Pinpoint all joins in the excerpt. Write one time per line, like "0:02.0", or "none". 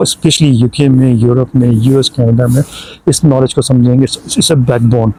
none